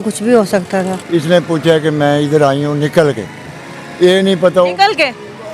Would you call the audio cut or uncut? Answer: cut